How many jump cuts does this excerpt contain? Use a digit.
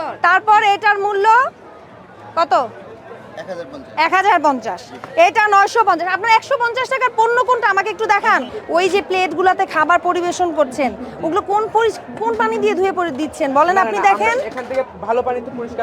1